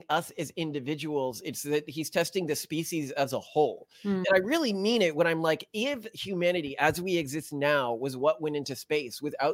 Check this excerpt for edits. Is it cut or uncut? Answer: uncut